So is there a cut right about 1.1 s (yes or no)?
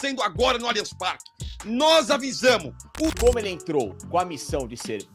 no